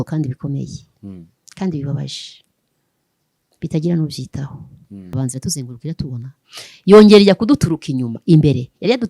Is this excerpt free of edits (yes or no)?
no